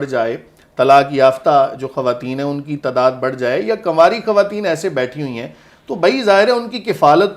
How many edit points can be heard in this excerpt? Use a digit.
0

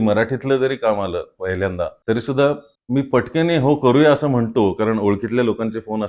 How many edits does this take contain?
2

